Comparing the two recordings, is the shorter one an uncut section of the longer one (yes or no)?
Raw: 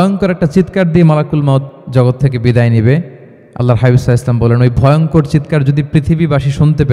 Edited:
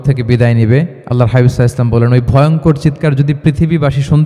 no